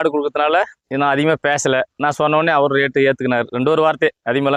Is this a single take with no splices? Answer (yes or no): yes